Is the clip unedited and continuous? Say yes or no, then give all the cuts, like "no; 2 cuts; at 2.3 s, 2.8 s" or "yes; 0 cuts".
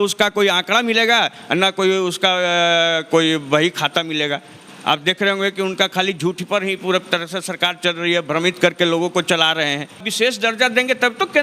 no; 1 cut; at 10.1 s